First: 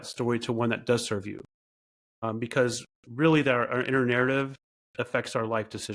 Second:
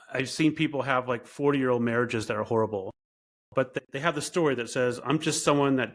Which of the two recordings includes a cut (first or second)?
second